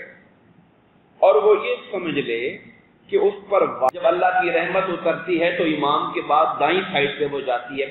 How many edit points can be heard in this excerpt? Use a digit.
1